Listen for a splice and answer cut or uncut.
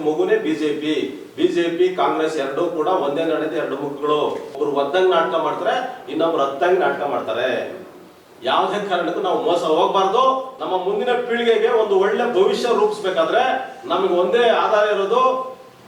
cut